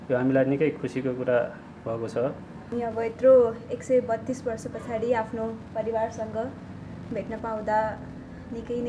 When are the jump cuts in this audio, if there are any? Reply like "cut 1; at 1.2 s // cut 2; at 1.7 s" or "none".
cut 1; at 2.7 s

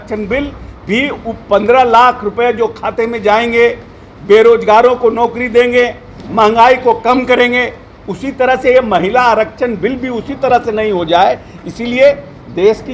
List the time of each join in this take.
none

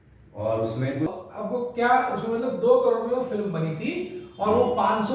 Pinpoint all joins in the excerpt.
cut 1; at 1.1 s

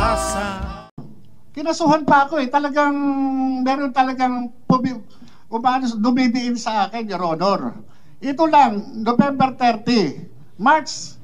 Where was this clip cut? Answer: cut 1; at 1.1 s

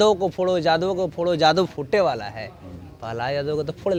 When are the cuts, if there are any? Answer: none

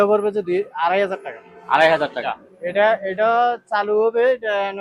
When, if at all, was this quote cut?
cut 1; at 2.2 s

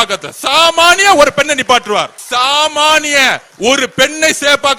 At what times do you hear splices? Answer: cut 1; at 2.2 s

